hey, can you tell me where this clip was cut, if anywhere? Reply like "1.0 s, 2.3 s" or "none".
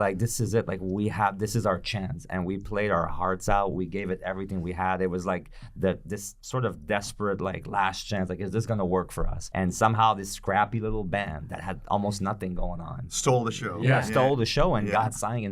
9.4 s, 13.1 s